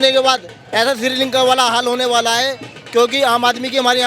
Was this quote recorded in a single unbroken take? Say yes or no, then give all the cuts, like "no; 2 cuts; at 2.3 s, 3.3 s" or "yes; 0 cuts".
yes; 0 cuts